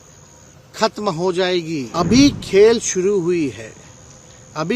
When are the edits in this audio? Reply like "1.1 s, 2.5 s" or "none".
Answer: 1.9 s